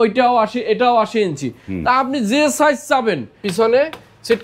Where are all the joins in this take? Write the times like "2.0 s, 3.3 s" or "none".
3.4 s